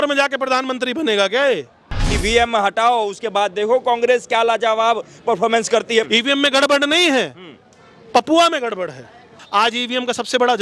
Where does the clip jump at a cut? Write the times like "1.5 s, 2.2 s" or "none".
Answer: 2.1 s, 6.1 s, 9.4 s